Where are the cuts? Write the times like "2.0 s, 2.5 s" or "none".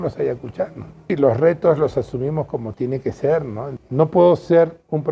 1.1 s, 3.7 s